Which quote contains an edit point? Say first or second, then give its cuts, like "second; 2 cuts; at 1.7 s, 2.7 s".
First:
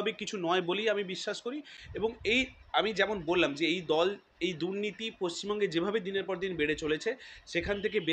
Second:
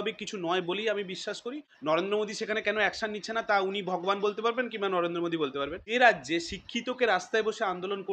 second; 2 cuts; at 1.7 s, 5.8 s